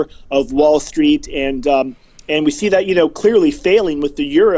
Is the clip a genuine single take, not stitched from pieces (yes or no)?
yes